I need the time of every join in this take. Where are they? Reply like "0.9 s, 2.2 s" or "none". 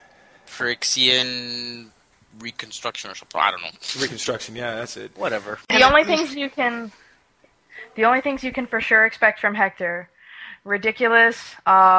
5.7 s